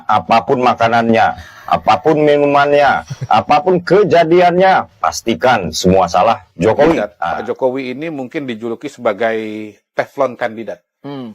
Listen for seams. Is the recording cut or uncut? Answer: cut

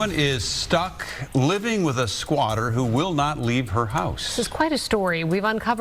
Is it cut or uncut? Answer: uncut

